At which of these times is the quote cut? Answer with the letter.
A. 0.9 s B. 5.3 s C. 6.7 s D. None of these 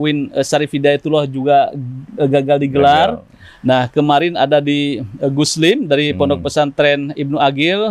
D